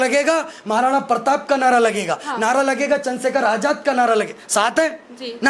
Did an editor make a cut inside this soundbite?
no; 0 cuts

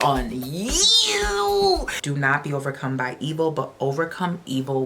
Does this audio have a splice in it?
yes; 1 cut; at 1.9 s

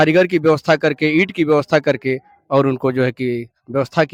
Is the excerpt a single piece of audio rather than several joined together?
yes; 0 cuts

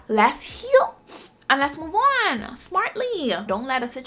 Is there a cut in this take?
no; 0 cuts

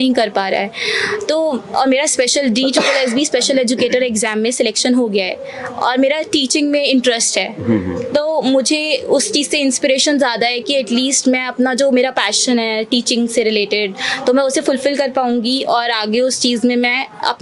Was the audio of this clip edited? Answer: no; 0 cuts

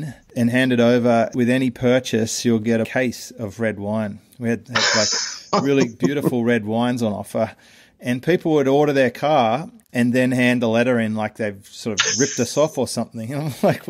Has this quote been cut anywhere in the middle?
no; 0 cuts

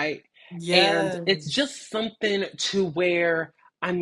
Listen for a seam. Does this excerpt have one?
no; 0 cuts

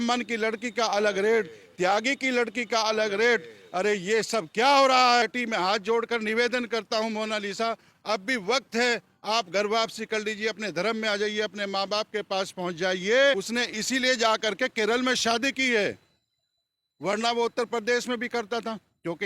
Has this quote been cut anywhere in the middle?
yes; 2 cuts; at 5.2 s, 13.4 s

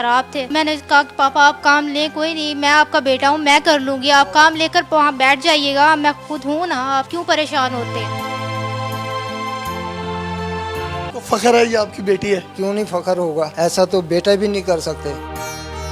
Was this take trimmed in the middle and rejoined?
yes; 1 cut; at 11.1 s

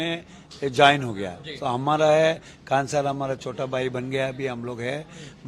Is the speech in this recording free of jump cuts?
yes; 0 cuts

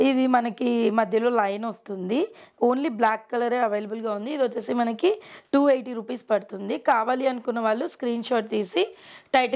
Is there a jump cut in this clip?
no; 0 cuts

